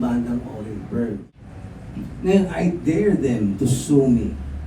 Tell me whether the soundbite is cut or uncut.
cut